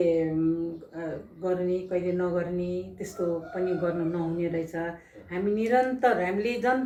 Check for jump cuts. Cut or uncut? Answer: uncut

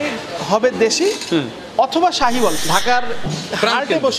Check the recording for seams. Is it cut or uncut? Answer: cut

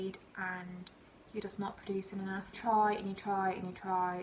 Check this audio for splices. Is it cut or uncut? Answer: cut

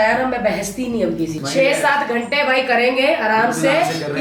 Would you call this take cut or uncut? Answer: cut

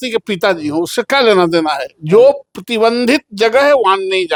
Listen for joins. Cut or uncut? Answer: uncut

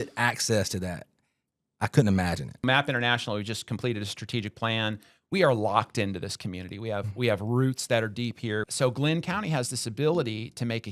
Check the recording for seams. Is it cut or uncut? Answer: cut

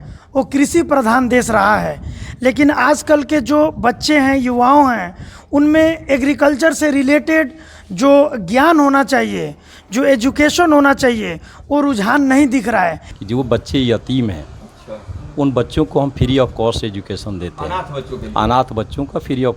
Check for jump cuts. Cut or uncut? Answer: cut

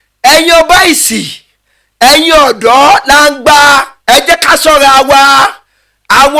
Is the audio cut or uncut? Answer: uncut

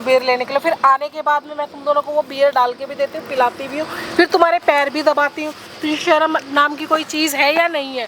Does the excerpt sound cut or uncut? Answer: uncut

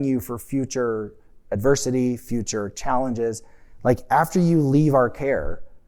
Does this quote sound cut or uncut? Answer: uncut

